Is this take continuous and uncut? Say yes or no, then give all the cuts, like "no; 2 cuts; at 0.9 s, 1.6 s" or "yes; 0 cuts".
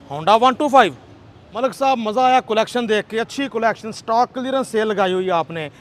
yes; 0 cuts